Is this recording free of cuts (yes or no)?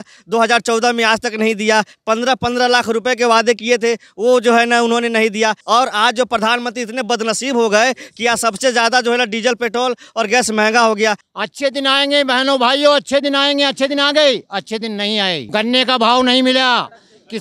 no